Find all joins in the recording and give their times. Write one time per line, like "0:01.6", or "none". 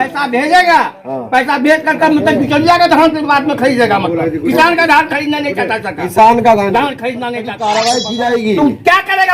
0:07.6